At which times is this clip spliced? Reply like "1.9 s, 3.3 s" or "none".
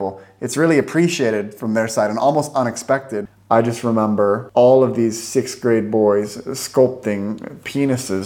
3.2 s, 4.4 s